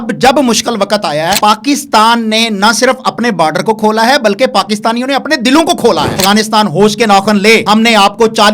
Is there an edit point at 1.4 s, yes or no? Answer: yes